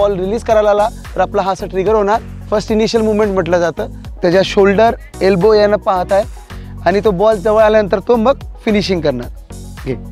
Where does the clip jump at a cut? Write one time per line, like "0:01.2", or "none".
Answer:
0:01.0
0:02.3
0:04.0